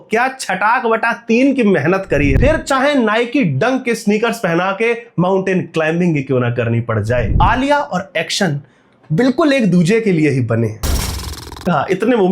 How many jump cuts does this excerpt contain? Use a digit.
3